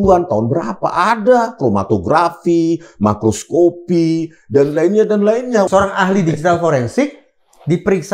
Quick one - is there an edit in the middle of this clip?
yes; 1 cut; at 5.7 s

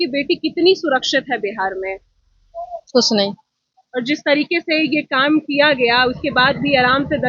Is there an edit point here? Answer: no; 0 cuts

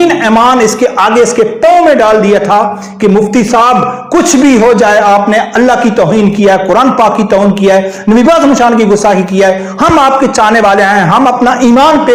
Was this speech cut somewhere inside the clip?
no; 0 cuts

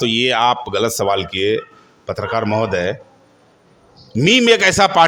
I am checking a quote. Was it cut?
no; 0 cuts

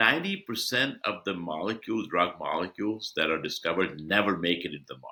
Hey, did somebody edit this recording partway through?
no; 0 cuts

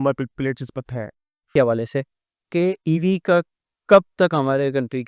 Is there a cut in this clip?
yes; 1 cut; at 1.5 s

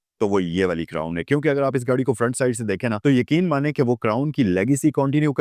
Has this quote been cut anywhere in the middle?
yes; 1 cut; at 3.0 s

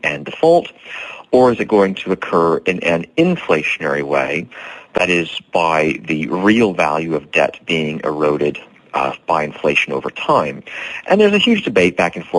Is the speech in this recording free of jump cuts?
yes; 0 cuts

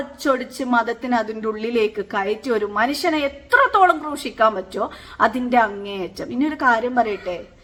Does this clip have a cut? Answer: no; 0 cuts

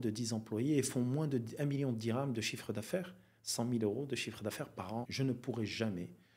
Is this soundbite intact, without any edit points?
no; 1 cut; at 5.1 s

